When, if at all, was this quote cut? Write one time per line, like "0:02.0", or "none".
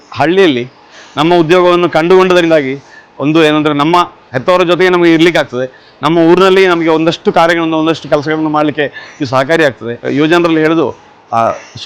0:04.3
0:10.1